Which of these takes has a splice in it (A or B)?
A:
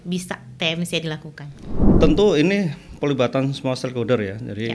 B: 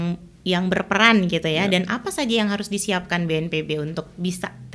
A